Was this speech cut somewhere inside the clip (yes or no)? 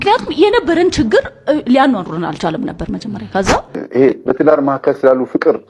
yes